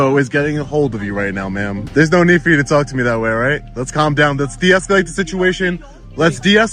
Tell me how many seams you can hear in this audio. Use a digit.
1